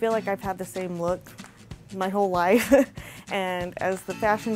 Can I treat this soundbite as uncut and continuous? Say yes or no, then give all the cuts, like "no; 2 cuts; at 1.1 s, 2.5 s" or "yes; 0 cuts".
yes; 0 cuts